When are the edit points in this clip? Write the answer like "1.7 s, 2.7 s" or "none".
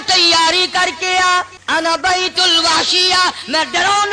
1.6 s